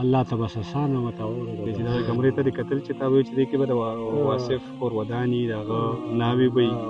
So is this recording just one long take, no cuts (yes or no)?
no